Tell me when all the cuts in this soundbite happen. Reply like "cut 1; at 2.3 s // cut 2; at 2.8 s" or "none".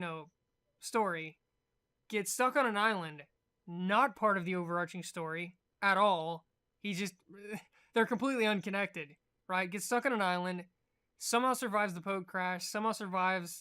cut 1; at 10.8 s